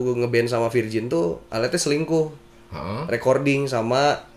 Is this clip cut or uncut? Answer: uncut